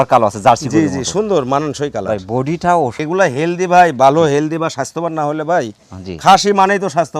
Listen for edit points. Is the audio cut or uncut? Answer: cut